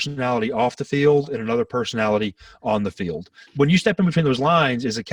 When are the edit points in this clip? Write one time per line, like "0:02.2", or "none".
0:03.5